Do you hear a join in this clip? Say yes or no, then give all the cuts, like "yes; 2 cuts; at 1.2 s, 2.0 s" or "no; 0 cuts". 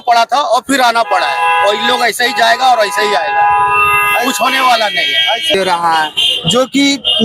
yes; 1 cut; at 5.5 s